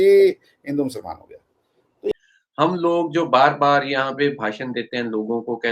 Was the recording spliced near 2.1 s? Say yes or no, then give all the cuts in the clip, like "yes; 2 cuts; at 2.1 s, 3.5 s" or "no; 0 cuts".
yes; 1 cut; at 2.1 s